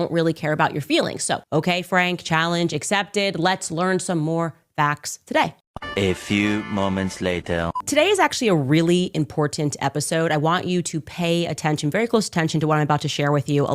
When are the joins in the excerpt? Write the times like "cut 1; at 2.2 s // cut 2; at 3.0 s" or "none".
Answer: cut 1; at 1.4 s